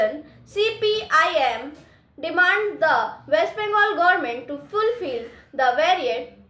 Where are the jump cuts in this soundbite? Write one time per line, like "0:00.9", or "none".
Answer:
none